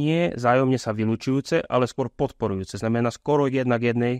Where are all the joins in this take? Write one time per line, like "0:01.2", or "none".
none